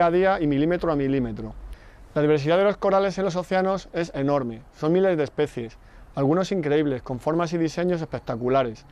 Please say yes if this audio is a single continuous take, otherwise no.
no